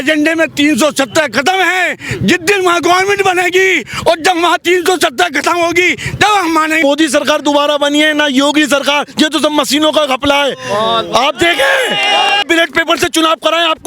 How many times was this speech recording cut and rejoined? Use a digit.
2